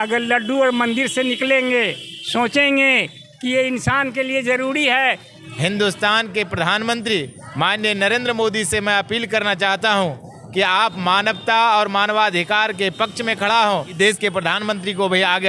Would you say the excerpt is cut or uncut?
cut